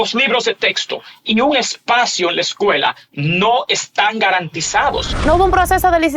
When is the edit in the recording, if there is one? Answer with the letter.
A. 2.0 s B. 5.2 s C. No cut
B